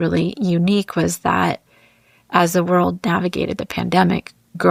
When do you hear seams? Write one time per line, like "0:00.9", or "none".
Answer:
none